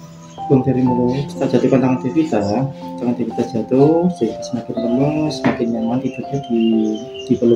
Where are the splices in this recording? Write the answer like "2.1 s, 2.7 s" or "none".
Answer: 1.3 s